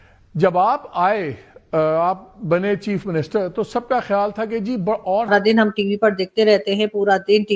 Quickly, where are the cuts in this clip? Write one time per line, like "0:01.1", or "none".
0:05.3